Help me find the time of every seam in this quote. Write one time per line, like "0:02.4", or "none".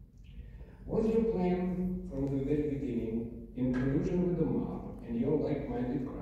none